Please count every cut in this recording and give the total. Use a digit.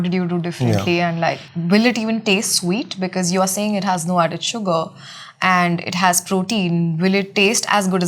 1